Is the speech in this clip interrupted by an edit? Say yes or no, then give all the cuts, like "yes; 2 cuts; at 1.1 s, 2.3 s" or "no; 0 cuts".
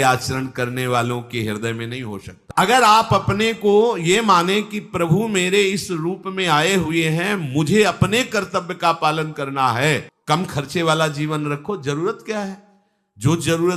yes; 2 cuts; at 2.4 s, 10.1 s